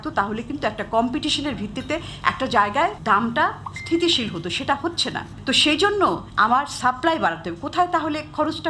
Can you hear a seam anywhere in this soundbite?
yes; 3 cuts; at 3.0 s, 5.3 s, 6.3 s

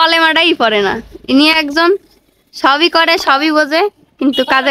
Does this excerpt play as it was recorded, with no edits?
yes; 0 cuts

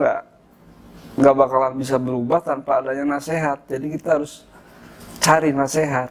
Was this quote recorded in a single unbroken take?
yes; 0 cuts

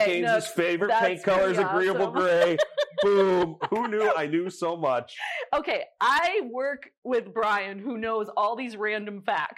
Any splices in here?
no; 0 cuts

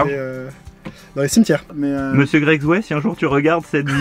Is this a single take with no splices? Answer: no; 1 cut; at 1.7 s

